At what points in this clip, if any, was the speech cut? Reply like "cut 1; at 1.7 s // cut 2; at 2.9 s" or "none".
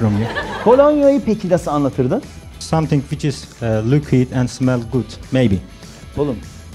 cut 1; at 2.5 s // cut 2; at 5.2 s